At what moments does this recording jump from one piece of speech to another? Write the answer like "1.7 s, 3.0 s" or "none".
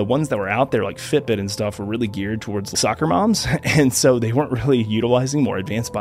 2.8 s